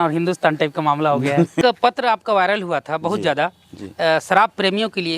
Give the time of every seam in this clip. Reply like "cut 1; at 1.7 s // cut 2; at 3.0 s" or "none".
cut 1; at 1.6 s